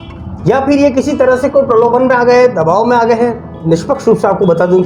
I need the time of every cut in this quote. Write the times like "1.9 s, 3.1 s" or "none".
3.6 s